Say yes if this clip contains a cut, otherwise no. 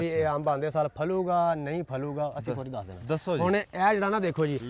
no